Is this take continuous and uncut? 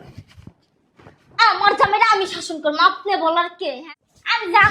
no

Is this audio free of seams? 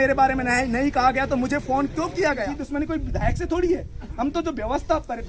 no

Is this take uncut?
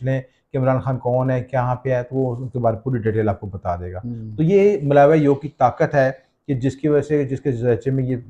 yes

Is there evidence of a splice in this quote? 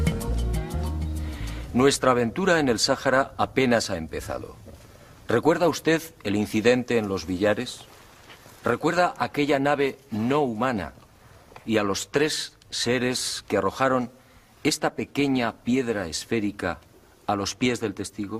yes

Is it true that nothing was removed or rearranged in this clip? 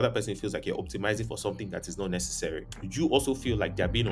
no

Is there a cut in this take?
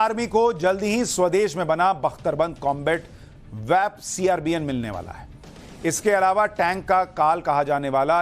yes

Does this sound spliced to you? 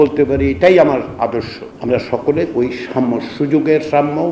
yes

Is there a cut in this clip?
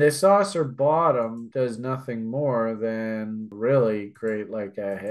yes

